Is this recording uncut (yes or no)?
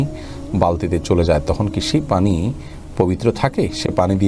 yes